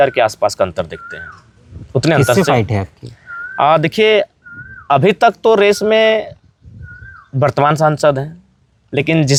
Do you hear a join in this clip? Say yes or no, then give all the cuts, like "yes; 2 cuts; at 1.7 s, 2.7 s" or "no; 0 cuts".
no; 0 cuts